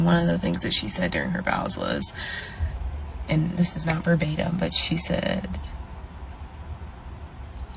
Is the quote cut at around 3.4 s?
no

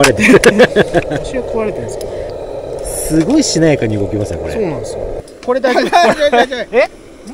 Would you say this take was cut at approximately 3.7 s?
no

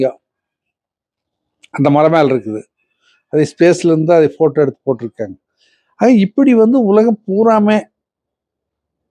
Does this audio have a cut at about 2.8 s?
no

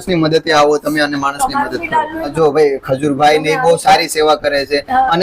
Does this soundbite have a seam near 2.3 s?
yes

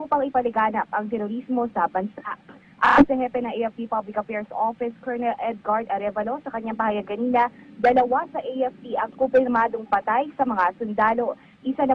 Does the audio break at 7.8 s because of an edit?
yes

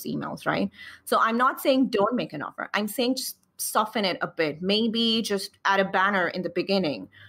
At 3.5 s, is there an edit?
no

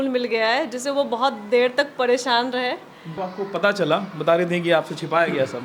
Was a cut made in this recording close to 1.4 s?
no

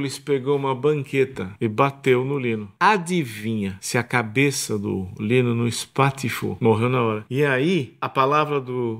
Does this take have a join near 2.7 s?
yes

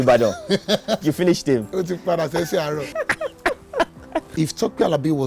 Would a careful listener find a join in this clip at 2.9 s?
yes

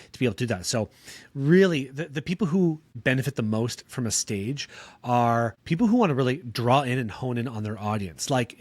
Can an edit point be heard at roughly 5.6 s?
yes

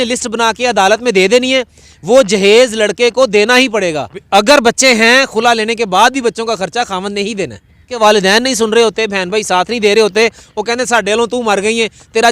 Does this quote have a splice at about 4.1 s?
yes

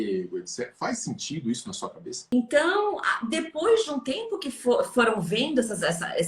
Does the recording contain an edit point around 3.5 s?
no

